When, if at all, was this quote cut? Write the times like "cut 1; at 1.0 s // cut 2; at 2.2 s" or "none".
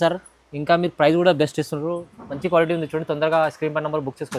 none